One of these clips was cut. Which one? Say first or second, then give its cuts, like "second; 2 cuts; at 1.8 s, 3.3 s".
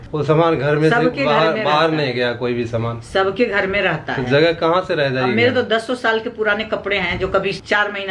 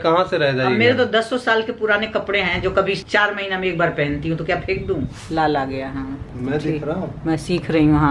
second; 2 cuts; at 5.2 s, 6.3 s